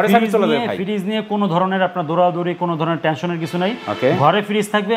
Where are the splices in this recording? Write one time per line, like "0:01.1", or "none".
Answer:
none